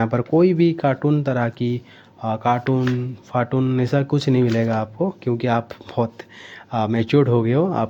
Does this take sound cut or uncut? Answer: uncut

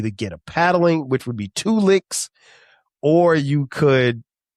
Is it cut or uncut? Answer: uncut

